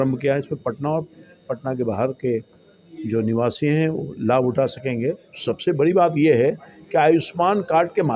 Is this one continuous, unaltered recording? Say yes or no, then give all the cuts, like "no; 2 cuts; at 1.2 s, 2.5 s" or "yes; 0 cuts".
no; 1 cut; at 5.3 s